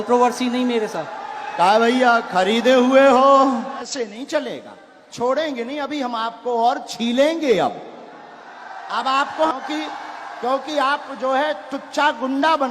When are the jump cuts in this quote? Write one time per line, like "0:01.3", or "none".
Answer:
0:03.9
0:09.5